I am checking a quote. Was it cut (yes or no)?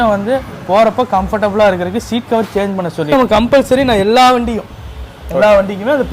yes